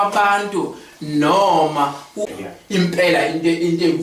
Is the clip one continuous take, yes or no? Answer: no